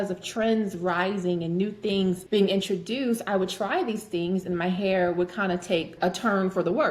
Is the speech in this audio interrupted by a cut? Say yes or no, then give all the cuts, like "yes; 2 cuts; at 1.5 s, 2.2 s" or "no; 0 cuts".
yes; 2 cuts; at 2.2 s, 5.9 s